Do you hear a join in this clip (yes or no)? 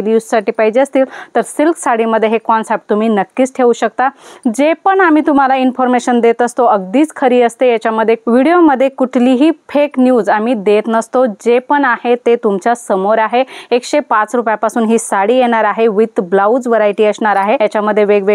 no